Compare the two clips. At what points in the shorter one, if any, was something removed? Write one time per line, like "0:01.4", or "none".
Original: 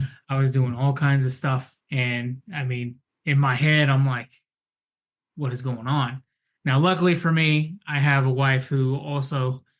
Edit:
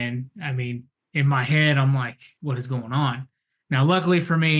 0:02.2